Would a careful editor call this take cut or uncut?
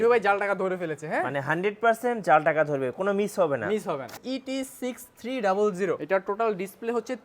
cut